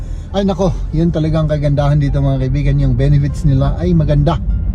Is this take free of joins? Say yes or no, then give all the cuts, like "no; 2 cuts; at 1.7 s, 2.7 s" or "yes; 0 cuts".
yes; 0 cuts